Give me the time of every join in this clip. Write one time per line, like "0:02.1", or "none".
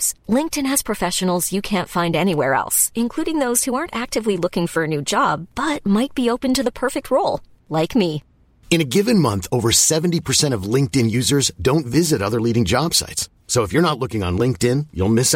none